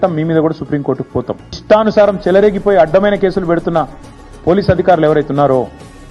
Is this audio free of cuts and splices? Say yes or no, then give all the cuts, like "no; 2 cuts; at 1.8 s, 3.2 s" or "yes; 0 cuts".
no; 1 cut; at 1.6 s